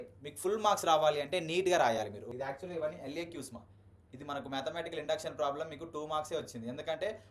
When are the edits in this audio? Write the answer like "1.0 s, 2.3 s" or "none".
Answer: 2.3 s

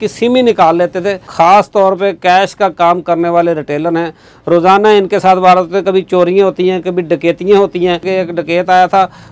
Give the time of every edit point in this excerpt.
1.3 s, 8.1 s

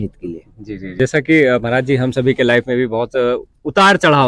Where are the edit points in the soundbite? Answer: 1.0 s

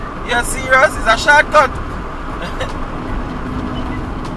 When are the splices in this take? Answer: none

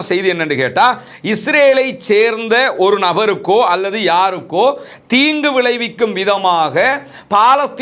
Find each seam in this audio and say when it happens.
none

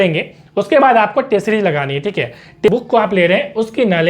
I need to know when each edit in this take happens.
2.7 s

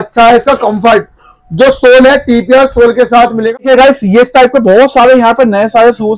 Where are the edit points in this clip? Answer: 3.6 s

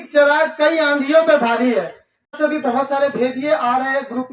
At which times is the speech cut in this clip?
2.4 s

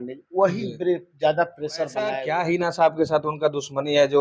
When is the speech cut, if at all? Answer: 2.2 s

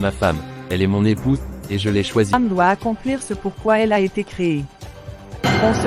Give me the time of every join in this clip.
2.3 s

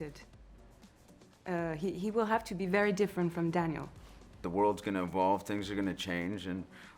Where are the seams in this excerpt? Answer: 4.4 s

